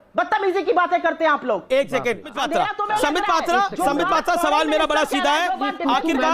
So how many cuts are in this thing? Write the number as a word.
one